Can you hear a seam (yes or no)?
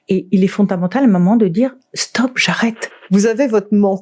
yes